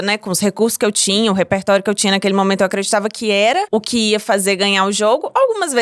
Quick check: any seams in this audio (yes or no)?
yes